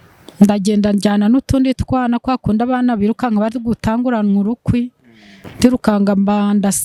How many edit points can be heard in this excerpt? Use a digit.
0